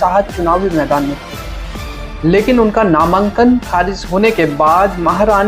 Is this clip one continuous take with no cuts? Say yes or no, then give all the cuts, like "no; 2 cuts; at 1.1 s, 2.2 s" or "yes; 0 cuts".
yes; 0 cuts